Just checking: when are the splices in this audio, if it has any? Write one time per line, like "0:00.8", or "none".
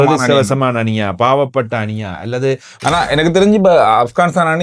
0:02.7